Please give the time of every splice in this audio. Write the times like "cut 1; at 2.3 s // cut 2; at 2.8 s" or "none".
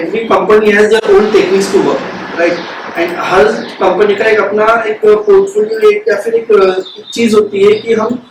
none